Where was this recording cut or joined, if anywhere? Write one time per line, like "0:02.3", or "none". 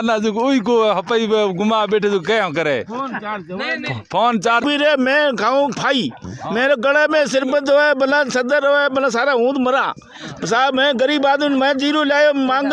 0:04.6